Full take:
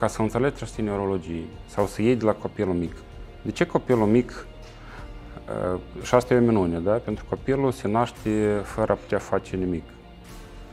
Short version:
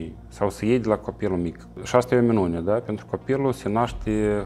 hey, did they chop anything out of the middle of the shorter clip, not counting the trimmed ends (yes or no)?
yes